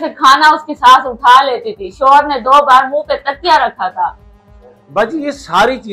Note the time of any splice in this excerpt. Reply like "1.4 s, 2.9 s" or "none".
none